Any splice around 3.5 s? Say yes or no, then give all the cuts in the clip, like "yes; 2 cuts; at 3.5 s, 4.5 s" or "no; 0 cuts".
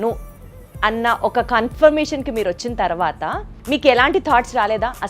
yes; 1 cut; at 3.5 s